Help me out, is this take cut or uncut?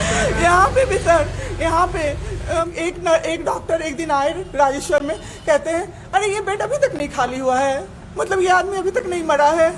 cut